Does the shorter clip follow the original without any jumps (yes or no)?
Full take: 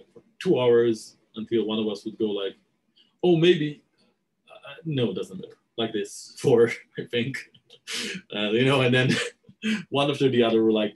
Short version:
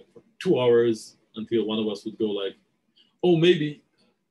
yes